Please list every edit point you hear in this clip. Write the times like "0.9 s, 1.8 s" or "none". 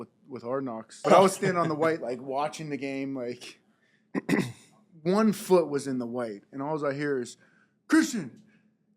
0.9 s

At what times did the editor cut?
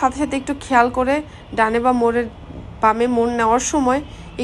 none

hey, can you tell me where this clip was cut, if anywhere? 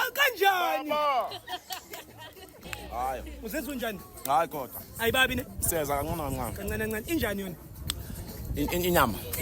2.6 s

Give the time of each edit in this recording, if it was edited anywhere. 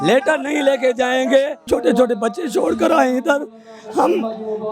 1.6 s

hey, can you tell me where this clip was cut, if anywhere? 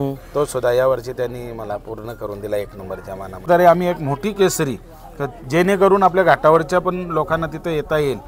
3.5 s

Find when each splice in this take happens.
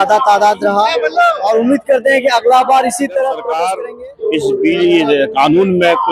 3.7 s

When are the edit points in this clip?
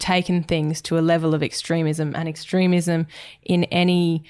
none

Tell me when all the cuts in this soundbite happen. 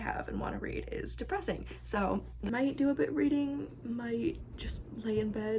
2.5 s

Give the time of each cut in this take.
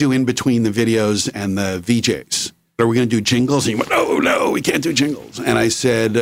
none

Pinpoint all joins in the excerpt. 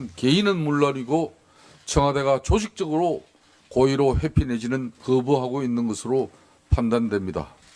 none

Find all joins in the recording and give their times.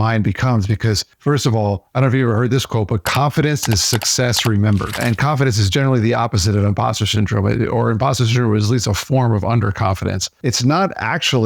5.0 s, 10.3 s

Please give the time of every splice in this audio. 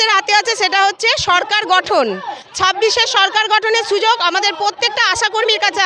none

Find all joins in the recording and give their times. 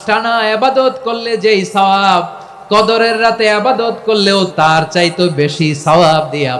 4.5 s

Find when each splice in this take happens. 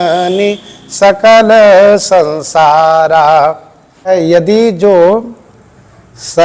4.1 s

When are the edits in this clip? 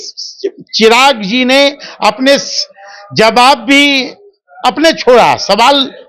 none

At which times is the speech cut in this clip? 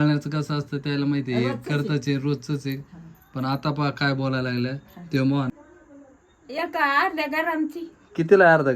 5.5 s

